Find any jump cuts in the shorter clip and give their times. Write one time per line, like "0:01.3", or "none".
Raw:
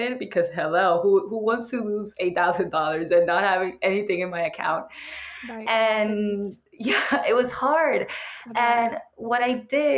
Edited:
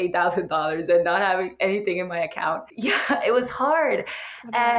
0:02.7